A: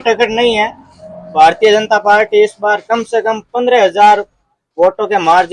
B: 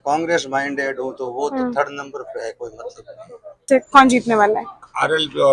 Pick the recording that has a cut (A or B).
B